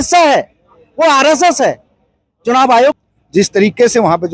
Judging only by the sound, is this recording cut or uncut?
cut